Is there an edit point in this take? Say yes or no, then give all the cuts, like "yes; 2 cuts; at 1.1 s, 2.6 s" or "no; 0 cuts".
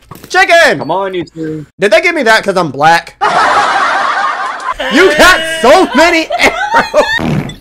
yes; 1 cut; at 4.7 s